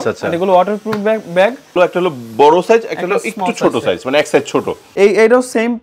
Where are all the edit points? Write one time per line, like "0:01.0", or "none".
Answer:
0:01.8
0:04.8